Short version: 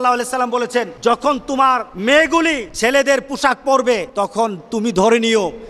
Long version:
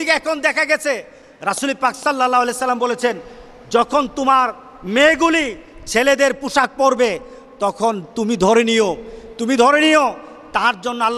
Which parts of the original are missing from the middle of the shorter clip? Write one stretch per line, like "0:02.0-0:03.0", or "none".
0:03.2-0:03.6
0:04.6-0:04.8
0:05.6-0:05.8
0:07.2-0:07.5